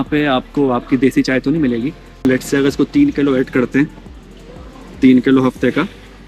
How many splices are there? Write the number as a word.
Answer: one